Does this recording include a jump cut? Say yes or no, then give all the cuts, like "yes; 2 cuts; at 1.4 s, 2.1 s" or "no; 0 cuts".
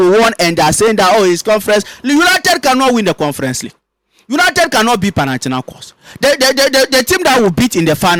no; 0 cuts